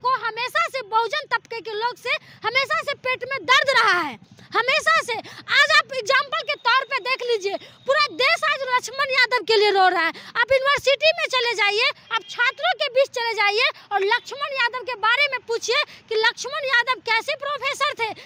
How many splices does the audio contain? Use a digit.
0